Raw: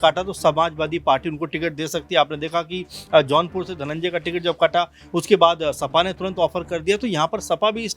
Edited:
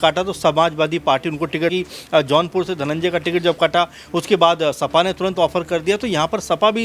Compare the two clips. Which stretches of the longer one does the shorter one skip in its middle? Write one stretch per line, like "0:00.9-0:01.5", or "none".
0:01.7-0:02.7